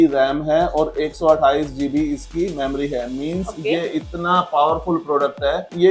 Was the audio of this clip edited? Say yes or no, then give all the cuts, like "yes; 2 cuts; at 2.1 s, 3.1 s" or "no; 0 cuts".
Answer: no; 0 cuts